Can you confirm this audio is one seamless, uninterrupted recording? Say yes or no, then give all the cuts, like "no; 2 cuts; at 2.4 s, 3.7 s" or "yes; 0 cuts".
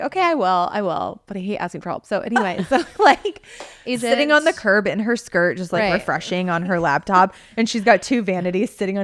no; 1 cut; at 3.8 s